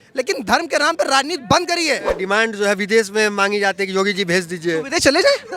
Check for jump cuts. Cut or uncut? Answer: cut